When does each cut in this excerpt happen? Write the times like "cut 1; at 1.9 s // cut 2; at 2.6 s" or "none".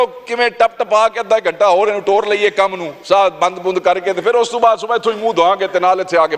none